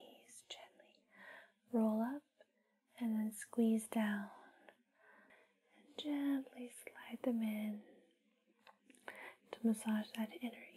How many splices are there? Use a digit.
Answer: 1